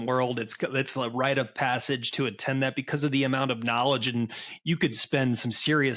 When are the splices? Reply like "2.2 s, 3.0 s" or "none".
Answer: none